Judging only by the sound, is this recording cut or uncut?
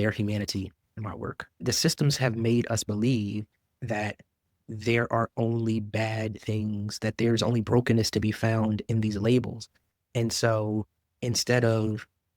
cut